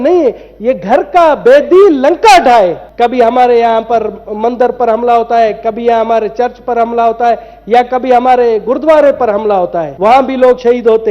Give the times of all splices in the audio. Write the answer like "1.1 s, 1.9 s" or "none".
2.8 s, 9.9 s